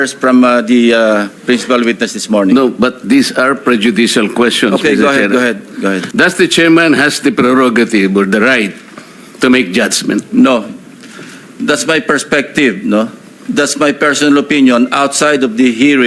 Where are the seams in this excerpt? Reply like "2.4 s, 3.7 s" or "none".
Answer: 6.1 s